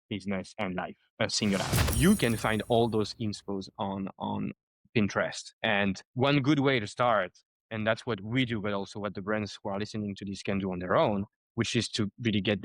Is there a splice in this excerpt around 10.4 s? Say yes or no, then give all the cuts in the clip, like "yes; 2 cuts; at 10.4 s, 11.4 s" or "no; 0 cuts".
no; 1 cut; at 1.8 s